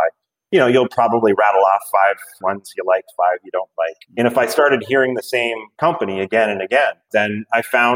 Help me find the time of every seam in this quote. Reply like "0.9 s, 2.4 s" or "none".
none